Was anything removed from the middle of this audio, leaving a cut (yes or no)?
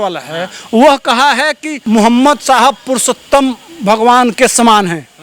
yes